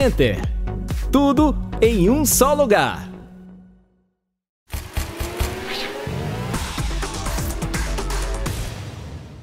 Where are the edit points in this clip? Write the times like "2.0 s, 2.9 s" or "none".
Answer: 4.2 s